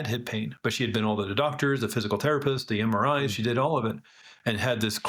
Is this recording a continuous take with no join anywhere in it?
yes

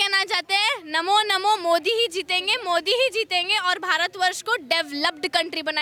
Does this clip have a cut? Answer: no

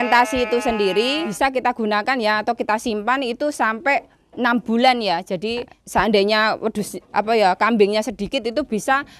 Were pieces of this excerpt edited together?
yes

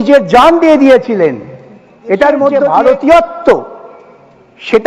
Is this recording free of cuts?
no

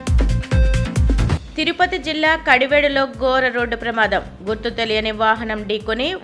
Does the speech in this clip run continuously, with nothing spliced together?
no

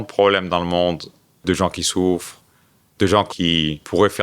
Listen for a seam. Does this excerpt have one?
yes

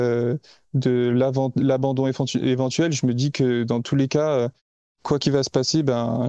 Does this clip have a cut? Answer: no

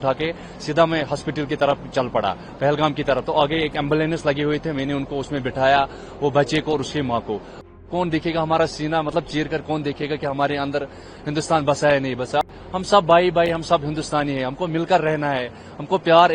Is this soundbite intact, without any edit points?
no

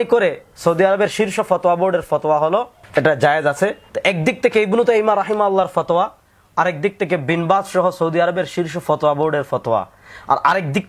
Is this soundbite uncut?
no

